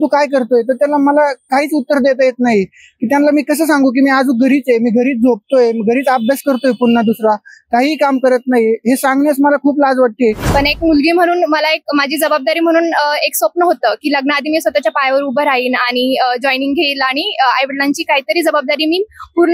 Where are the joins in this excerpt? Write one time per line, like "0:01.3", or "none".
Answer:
0:10.4